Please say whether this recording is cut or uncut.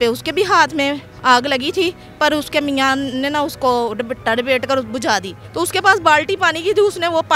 cut